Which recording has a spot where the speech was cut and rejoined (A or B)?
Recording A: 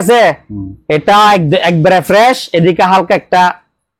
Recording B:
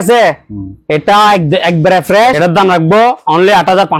B